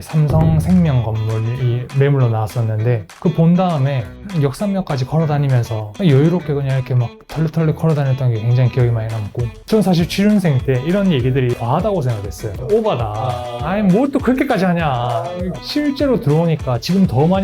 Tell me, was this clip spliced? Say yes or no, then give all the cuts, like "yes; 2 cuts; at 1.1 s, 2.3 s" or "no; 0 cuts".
yes; 3 cuts; at 5.8 s, 9.5 s, 11.6 s